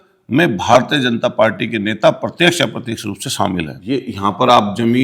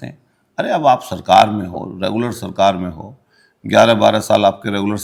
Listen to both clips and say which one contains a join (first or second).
first